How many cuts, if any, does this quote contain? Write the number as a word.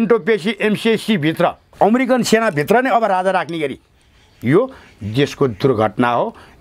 one